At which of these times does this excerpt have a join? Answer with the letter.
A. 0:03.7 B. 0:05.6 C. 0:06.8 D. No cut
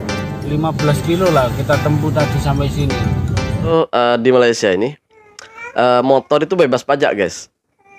A